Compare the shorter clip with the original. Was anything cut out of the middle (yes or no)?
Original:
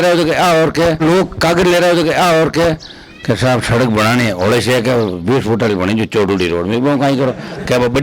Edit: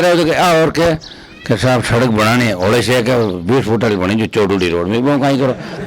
yes